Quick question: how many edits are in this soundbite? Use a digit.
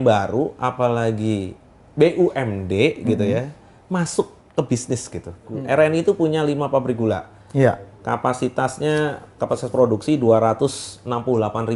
1